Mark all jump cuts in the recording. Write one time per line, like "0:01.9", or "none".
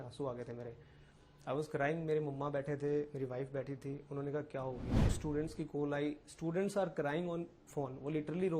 0:05.1